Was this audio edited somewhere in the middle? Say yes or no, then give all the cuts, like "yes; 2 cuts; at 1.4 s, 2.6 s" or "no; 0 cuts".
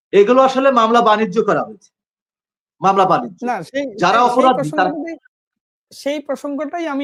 no; 0 cuts